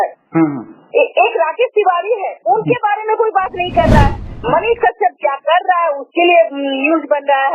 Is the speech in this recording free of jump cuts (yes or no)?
no